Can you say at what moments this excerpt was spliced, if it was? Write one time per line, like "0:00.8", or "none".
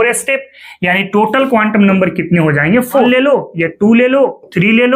0:03.1